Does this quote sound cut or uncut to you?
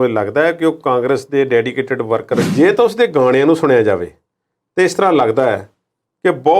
cut